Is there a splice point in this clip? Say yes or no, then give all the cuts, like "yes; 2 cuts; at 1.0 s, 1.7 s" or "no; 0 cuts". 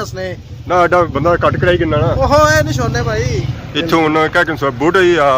yes; 1 cut; at 3.5 s